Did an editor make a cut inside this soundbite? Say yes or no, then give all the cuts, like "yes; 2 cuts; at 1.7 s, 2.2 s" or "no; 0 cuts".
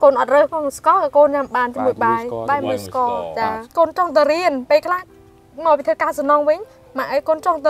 yes; 1 cut; at 3.6 s